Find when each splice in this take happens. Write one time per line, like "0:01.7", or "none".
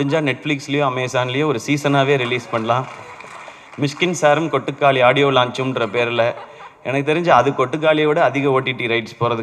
none